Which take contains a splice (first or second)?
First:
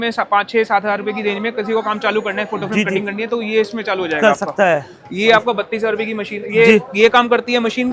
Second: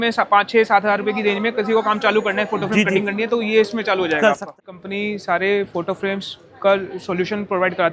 second